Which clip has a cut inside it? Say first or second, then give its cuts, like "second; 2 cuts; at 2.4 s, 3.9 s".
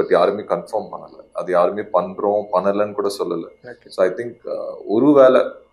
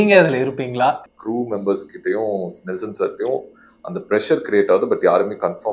second; 1 cut; at 1.1 s